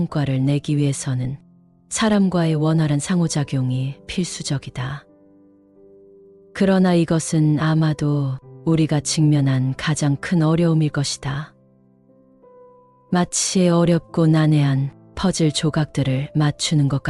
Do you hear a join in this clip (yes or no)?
no